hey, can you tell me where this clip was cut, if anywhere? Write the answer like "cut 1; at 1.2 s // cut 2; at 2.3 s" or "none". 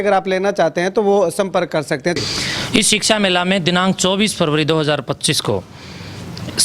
cut 1; at 2.2 s

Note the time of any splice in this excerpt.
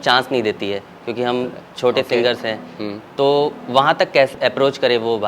cut 1; at 4.3 s

